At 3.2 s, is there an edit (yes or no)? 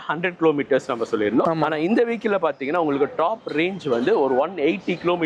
no